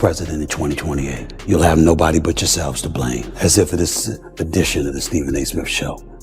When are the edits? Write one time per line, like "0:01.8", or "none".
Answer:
0:01.3
0:03.3